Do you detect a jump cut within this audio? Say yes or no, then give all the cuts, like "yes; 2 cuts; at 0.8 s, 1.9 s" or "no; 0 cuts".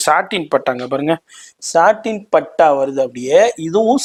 no; 0 cuts